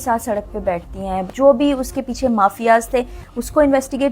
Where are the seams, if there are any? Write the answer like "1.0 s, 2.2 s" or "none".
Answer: 1.3 s